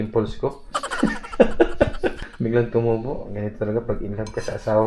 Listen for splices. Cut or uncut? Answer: cut